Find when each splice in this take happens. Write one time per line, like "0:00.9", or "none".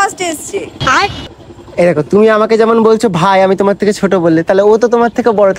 none